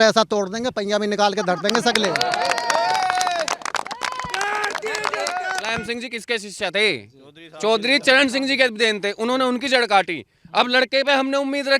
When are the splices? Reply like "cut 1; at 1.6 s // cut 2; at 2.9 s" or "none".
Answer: cut 1; at 5.7 s